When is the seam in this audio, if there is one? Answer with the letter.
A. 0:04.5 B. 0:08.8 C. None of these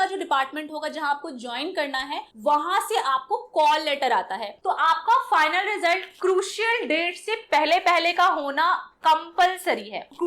A